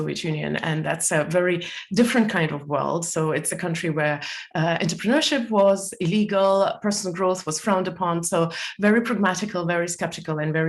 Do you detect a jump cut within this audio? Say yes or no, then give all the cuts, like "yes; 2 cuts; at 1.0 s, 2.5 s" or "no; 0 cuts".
no; 0 cuts